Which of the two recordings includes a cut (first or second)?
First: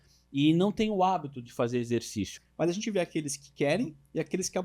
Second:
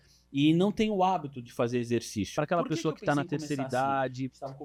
first